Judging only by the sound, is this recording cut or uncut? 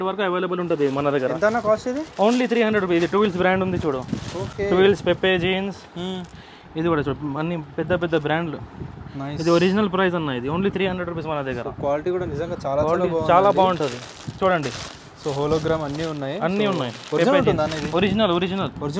uncut